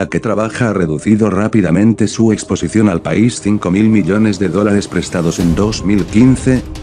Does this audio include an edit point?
no; 0 cuts

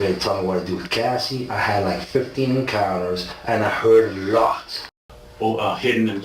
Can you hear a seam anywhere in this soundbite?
yes; 1 cut; at 4.9 s

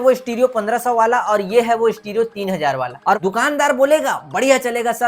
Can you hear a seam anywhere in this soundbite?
yes; 1 cut; at 3.2 s

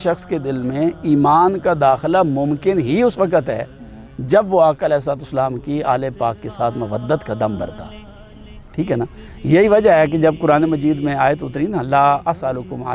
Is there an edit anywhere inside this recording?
no; 0 cuts

